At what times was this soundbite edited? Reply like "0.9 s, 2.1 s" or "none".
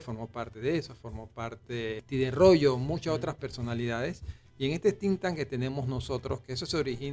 2.0 s